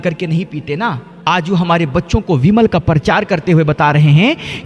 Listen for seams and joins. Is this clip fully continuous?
yes; 0 cuts

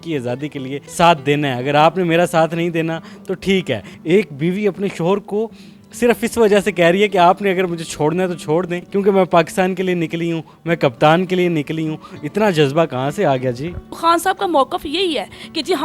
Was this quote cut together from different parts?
yes; 1 cut; at 13.8 s

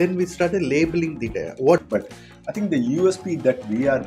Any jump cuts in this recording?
yes; 1 cut; at 1.8 s

